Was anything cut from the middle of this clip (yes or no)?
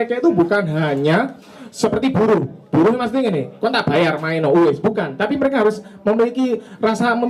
no